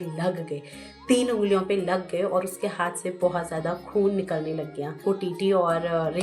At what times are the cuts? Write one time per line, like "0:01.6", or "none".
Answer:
0:05.0